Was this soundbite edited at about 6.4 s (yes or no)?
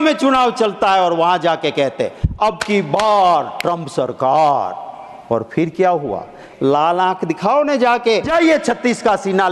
yes